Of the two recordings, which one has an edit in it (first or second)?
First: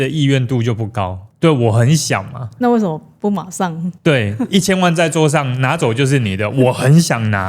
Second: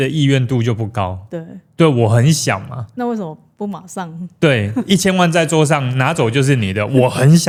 first